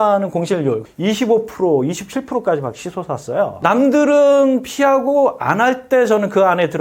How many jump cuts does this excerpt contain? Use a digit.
2